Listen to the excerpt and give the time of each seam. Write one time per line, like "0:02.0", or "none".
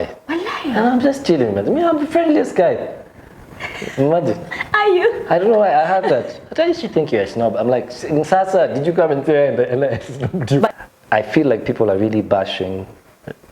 0:10.7